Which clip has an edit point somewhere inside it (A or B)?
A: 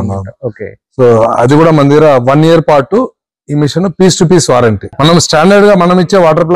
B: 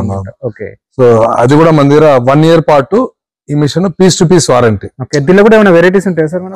A